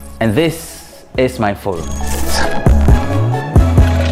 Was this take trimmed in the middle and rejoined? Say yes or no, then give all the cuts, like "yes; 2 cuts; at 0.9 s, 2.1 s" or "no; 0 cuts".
no; 0 cuts